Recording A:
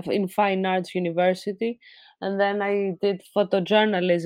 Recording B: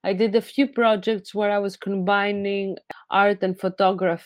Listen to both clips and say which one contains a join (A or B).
B